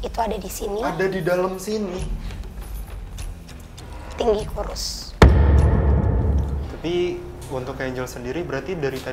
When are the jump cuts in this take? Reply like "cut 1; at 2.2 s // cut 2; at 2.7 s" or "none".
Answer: cut 1; at 6.5 s